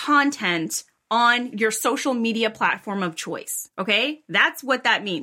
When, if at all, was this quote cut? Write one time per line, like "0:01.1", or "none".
0:01.5
0:03.6